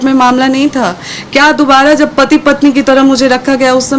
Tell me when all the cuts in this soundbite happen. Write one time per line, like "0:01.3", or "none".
none